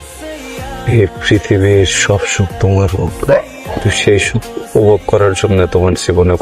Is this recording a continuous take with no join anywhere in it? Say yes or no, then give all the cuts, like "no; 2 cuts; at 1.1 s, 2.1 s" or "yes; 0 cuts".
yes; 0 cuts